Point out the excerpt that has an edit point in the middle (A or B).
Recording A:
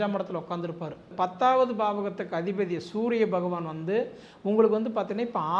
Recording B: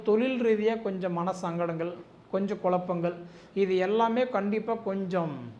A